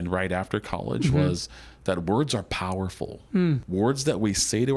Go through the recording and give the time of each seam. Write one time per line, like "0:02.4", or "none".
0:03.6